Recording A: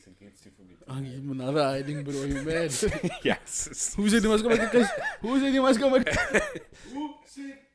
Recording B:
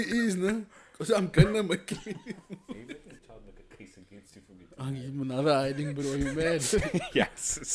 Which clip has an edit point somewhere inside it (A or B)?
B